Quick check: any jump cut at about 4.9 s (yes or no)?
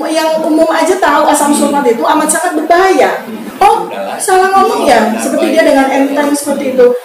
no